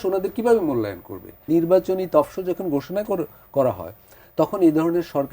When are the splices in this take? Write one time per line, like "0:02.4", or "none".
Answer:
0:01.4